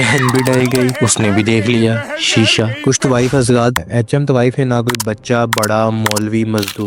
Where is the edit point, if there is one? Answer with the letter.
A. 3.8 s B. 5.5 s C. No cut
A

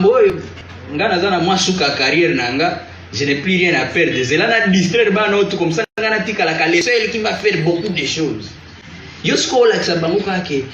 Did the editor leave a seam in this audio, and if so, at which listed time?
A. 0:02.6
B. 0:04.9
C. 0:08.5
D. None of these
D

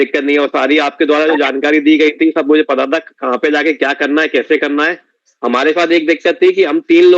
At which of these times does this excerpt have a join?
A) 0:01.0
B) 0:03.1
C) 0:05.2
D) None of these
C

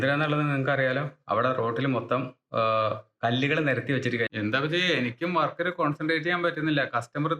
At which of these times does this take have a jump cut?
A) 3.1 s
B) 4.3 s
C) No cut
B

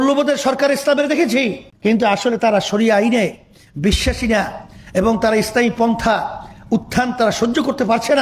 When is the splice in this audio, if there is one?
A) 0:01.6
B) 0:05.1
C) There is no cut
A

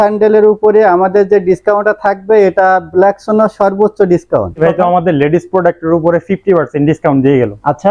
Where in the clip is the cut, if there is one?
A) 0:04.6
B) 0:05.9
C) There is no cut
A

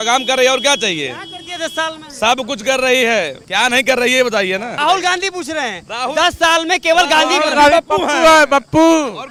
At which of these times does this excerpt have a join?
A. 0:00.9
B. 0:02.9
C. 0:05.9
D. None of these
D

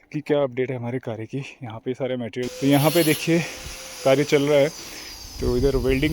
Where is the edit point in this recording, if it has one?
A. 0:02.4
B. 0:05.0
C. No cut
A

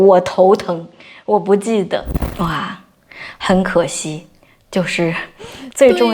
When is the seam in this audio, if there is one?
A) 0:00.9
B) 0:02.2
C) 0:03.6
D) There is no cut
B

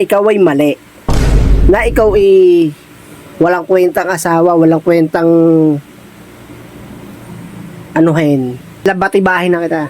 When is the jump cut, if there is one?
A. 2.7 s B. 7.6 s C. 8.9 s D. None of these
C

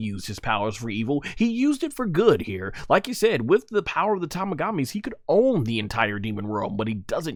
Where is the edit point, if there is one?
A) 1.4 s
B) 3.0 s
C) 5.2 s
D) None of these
D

